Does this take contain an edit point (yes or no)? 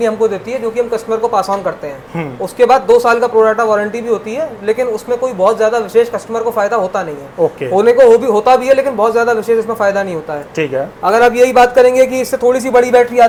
no